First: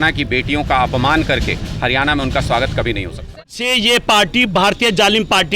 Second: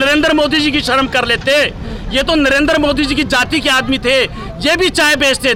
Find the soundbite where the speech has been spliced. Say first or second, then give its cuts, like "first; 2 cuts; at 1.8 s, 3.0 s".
first; 1 cut; at 3.5 s